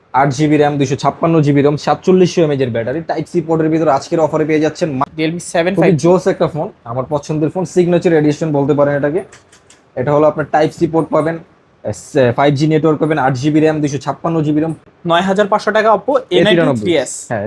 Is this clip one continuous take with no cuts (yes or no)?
no